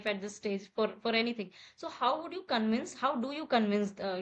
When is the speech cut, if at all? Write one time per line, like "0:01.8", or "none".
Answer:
none

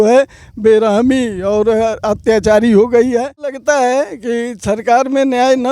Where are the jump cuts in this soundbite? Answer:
0:03.6

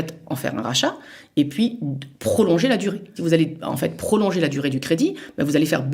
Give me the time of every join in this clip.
0:03.1

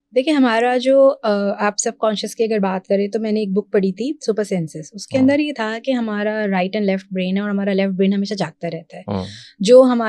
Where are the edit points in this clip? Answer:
none

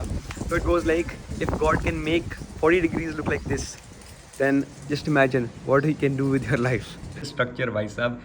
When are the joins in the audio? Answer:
0:07.3

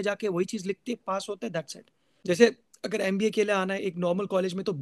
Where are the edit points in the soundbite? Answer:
0:02.1

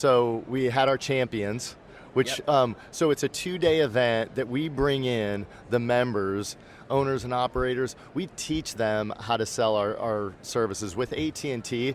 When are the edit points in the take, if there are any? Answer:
none

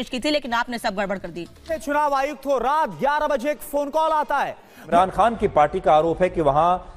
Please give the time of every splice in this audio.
0:01.7
0:04.9

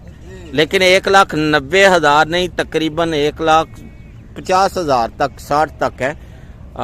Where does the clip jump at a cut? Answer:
none

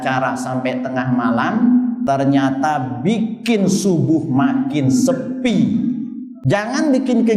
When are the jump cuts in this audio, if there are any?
0:06.4

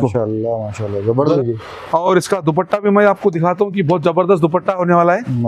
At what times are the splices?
0:01.2

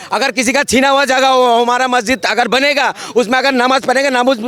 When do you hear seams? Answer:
none

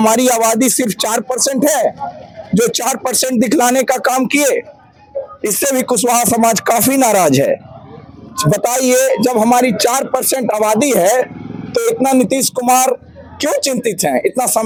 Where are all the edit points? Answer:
none

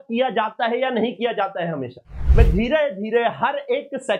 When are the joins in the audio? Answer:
0:02.1

